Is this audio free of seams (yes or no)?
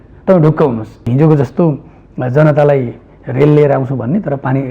no